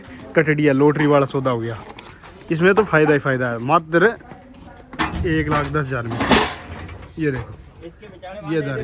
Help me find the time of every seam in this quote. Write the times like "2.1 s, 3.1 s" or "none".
none